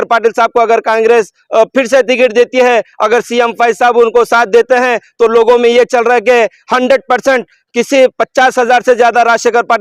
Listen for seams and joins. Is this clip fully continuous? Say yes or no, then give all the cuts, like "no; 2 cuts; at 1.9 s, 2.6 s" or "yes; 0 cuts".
yes; 0 cuts